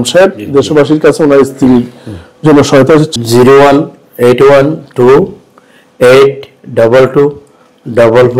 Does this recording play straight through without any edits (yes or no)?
no